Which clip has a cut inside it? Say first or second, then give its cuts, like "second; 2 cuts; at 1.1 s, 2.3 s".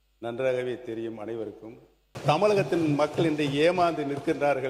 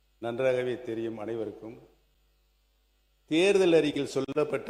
first; 1 cut; at 2.1 s